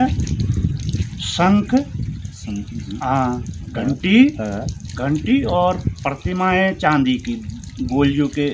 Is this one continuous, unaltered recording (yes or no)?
yes